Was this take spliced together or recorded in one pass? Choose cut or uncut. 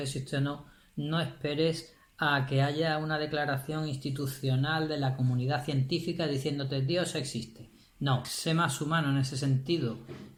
uncut